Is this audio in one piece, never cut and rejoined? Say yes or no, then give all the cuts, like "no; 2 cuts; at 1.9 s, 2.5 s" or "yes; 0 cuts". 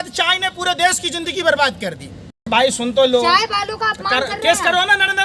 no; 1 cut; at 2.5 s